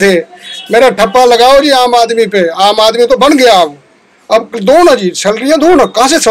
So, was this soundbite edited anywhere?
no; 0 cuts

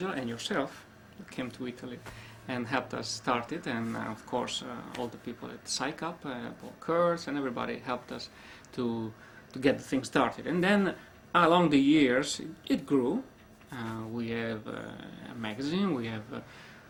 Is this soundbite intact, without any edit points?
yes; 0 cuts

